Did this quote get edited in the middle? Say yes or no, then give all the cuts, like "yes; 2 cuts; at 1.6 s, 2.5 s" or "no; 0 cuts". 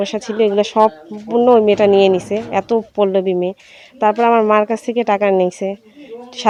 no; 0 cuts